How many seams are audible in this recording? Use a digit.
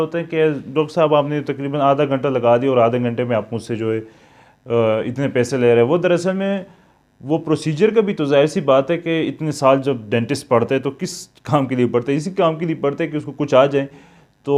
0